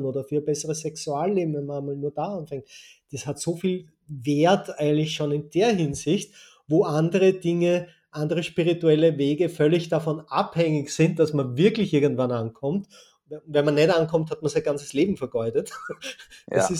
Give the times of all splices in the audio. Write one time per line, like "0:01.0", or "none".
none